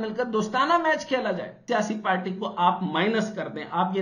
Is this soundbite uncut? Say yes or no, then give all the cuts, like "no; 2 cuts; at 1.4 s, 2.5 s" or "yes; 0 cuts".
no; 1 cut; at 1.6 s